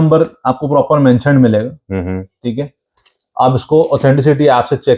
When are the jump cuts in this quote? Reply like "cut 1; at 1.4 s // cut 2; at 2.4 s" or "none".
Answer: none